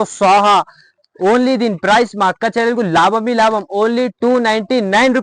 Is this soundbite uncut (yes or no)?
yes